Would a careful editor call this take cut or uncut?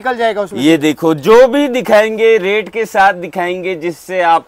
uncut